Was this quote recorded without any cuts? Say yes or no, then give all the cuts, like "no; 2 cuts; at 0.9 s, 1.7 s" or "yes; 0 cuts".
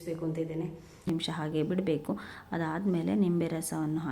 no; 1 cut; at 1.1 s